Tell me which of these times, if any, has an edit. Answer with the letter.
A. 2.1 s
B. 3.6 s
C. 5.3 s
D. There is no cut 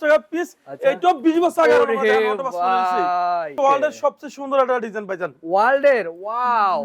B